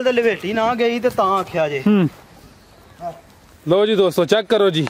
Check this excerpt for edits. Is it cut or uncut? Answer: uncut